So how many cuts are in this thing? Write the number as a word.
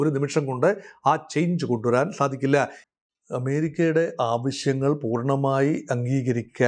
one